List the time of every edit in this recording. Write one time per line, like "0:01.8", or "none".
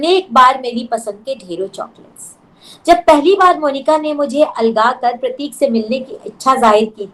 none